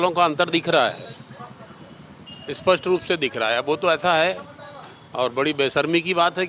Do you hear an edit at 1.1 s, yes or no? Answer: no